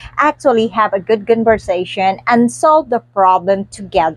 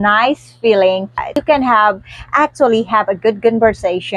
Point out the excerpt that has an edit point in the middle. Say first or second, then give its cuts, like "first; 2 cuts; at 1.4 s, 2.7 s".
second; 1 cut; at 1.2 s